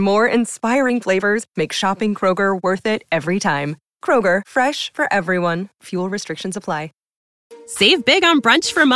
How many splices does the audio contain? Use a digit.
1